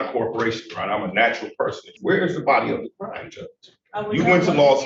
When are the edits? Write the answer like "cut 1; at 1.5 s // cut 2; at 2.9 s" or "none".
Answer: cut 1; at 1.9 s